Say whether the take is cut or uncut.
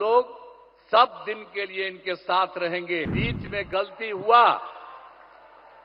cut